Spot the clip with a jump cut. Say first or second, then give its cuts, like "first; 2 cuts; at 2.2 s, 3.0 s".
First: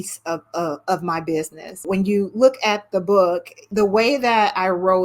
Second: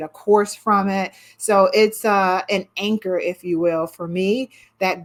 first; 2 cuts; at 1.8 s, 3.6 s